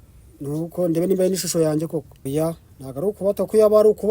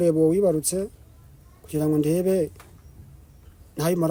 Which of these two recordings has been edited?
first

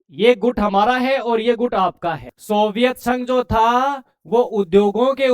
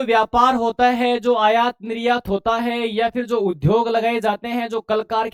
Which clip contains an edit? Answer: first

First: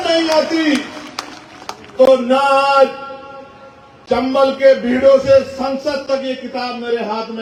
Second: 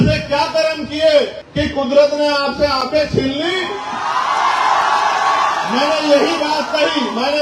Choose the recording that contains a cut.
second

